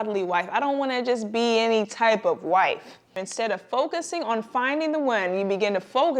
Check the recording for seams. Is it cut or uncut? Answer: cut